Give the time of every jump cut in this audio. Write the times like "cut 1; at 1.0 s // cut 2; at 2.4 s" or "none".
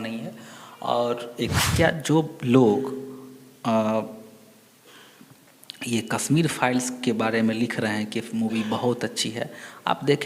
cut 1; at 1.5 s